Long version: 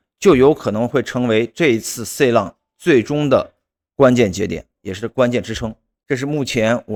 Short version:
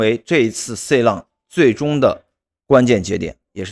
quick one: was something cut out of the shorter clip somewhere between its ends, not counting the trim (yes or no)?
no